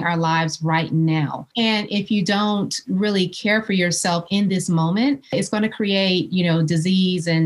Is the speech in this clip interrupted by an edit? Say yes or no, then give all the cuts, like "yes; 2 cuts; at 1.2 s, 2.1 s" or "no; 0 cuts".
yes; 2 cuts; at 1.4 s, 5.3 s